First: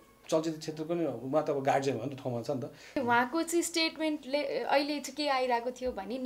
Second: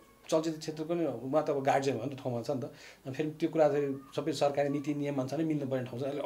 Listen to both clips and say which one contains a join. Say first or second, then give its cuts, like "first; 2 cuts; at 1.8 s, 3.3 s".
first; 1 cut; at 2.9 s